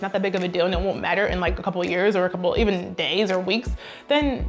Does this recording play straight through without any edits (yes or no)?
yes